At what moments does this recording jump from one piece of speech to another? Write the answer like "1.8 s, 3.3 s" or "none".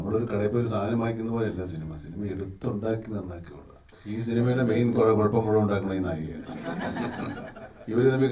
3.9 s